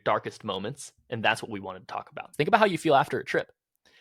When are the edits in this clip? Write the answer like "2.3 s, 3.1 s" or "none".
2.2 s